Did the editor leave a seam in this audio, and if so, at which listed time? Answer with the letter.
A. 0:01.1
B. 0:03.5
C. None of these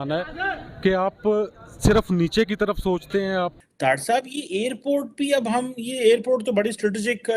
B